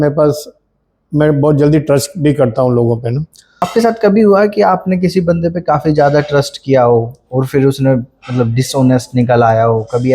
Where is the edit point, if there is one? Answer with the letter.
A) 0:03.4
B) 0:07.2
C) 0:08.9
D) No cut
A